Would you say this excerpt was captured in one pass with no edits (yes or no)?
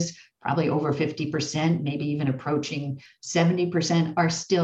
yes